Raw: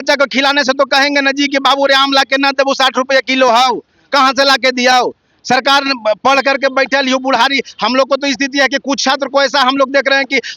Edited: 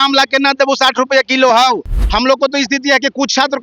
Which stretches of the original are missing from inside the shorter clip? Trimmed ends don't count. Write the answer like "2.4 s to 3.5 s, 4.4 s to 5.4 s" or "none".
4.0 s to 7.7 s